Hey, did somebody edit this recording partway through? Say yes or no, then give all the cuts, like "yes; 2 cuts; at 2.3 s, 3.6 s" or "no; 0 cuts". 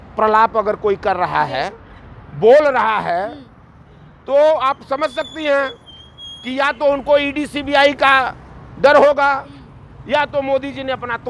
no; 0 cuts